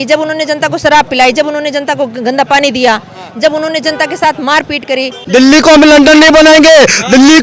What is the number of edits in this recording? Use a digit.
1